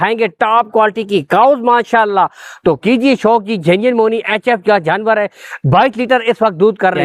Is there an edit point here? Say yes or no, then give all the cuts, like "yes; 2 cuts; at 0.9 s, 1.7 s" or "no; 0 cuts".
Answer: no; 0 cuts